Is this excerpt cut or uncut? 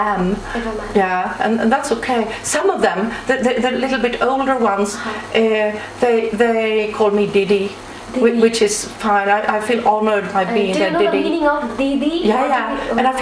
uncut